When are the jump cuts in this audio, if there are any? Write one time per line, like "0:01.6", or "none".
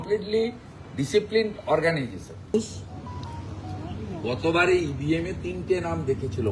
0:02.5